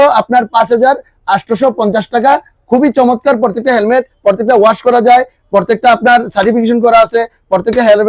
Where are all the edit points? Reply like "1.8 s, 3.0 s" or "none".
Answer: none